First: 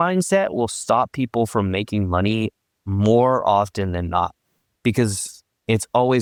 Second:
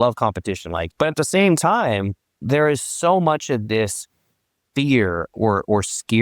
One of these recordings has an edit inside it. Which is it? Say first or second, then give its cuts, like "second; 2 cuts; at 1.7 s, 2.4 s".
second; 2 cuts; at 0.9 s, 2.3 s